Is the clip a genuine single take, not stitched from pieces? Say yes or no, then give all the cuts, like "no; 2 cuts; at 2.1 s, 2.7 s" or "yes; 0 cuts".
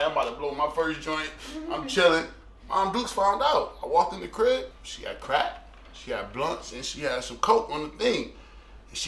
no; 1 cut; at 4.8 s